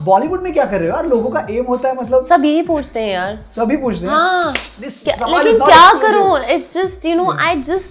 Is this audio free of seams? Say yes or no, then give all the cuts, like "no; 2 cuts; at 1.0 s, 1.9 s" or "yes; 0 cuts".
yes; 0 cuts